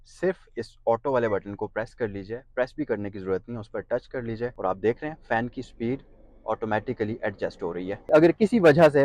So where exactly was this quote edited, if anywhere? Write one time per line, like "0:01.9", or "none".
0:04.6
0:08.1